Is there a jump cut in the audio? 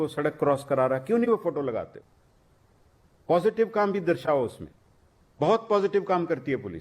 no; 0 cuts

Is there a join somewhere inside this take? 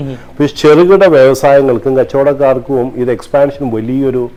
no; 0 cuts

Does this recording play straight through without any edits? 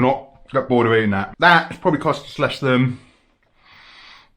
no; 1 cut; at 1.3 s

